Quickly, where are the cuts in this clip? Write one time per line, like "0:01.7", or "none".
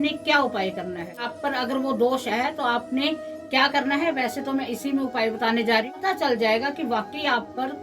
0:01.3
0:05.9

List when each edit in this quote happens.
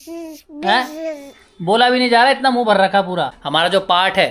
0:03.4

